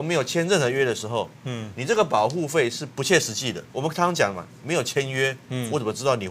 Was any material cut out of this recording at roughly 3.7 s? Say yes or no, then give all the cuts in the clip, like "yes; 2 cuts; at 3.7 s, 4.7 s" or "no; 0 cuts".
yes; 1 cut; at 3.7 s